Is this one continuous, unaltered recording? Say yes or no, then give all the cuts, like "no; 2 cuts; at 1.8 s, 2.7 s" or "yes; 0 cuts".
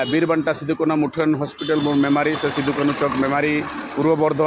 yes; 0 cuts